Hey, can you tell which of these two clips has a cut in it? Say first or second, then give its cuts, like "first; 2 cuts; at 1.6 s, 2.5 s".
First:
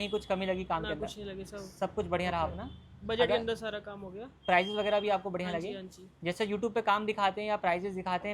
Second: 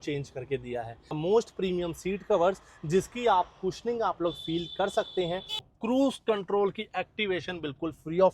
second; 2 cuts; at 1.2 s, 5.7 s